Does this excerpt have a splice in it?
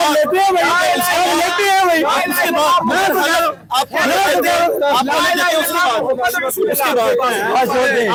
no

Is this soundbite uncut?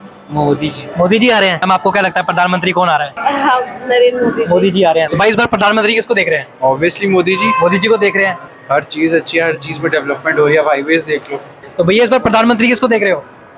no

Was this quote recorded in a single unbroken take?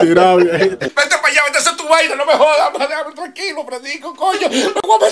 no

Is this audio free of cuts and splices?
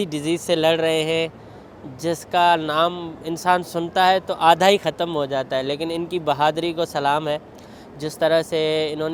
yes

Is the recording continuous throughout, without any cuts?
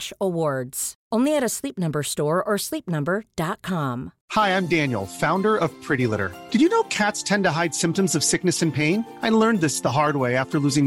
no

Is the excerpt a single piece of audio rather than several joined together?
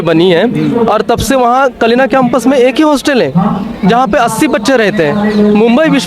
yes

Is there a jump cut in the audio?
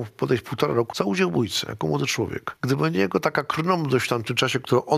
yes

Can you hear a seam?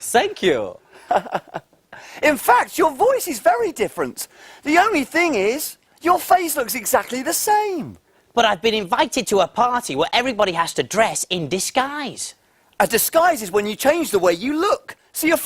yes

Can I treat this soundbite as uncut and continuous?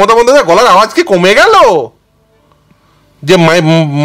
yes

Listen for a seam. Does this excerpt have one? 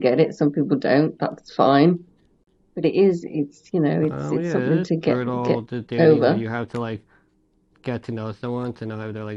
no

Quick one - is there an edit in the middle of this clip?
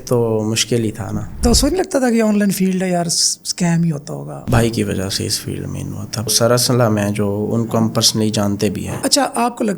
yes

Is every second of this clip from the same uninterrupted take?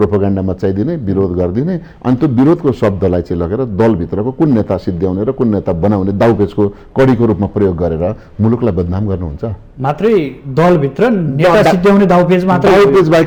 yes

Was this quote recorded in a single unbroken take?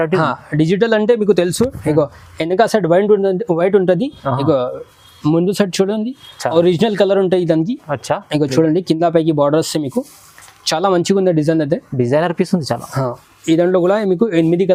yes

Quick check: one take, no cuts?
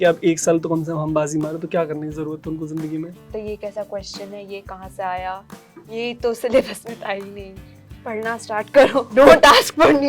no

